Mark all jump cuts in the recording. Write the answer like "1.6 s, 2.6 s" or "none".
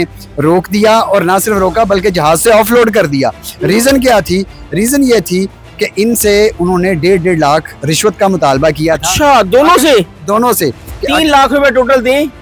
none